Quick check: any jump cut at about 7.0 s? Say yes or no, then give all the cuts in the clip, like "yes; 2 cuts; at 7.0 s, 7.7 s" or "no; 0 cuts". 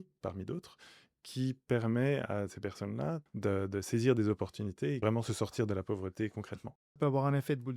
yes; 3 cuts; at 3.3 s, 5.0 s, 7.0 s